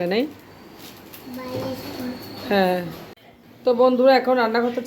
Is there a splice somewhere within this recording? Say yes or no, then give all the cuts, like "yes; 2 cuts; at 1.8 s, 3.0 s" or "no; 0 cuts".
yes; 1 cut; at 3.0 s